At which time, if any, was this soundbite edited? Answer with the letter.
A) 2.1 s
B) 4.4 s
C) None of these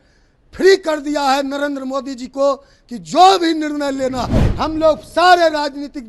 B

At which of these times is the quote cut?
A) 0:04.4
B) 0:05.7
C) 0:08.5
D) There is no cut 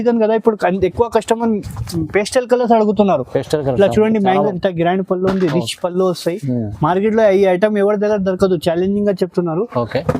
A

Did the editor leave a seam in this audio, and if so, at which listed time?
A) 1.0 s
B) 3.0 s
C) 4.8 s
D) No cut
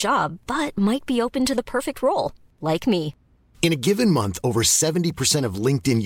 D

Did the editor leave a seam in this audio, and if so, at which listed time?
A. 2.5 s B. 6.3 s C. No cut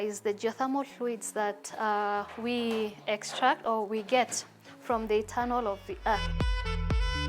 B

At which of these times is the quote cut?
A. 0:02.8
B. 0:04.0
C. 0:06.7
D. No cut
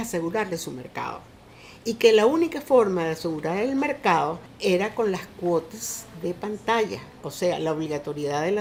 D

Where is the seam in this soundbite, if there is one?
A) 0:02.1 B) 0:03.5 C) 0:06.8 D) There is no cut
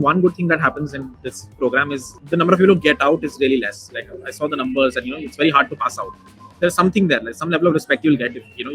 A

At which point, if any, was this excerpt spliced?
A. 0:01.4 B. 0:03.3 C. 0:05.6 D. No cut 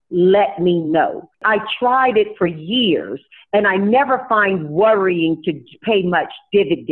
A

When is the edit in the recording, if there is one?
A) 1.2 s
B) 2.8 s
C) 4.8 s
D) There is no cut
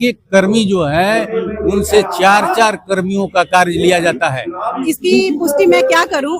C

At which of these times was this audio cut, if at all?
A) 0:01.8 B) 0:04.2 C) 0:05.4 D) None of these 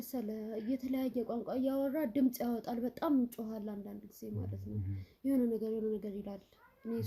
D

